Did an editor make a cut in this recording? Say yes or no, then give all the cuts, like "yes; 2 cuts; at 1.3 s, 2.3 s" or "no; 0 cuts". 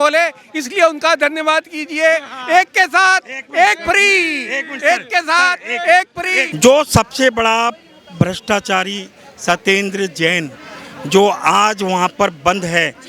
yes; 1 cut; at 6.5 s